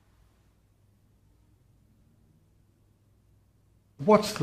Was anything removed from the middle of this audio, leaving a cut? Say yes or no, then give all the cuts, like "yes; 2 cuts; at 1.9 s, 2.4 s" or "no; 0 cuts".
no; 0 cuts